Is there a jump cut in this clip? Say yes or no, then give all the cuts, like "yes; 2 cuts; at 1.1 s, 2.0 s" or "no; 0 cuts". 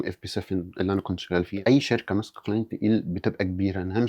yes; 1 cut; at 1.5 s